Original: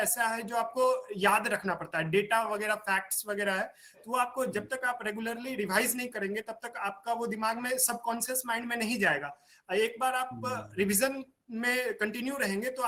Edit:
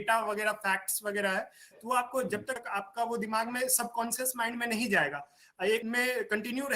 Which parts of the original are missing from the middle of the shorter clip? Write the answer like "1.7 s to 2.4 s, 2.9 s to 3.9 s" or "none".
4.8 s to 6.6 s, 9.9 s to 11.5 s